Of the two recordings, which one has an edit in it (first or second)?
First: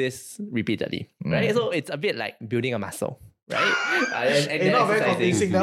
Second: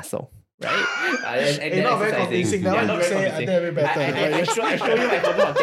first